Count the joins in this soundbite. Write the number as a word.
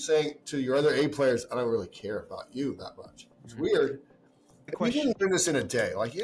one